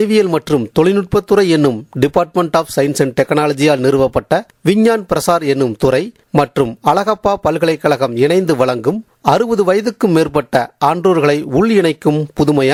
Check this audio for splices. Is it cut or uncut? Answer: uncut